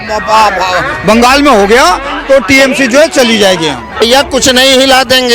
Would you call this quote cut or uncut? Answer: cut